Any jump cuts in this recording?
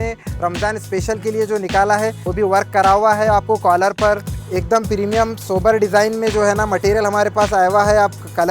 yes; 2 cuts; at 2.2 s, 4.3 s

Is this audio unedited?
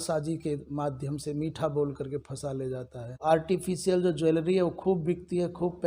no; 1 cut; at 3.2 s

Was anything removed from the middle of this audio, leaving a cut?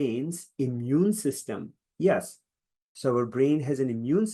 no; 0 cuts

